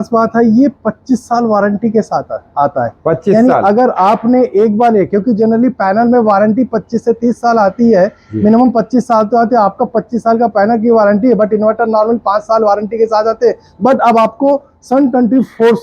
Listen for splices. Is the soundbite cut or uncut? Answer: uncut